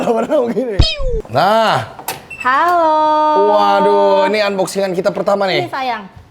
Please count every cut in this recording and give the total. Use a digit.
1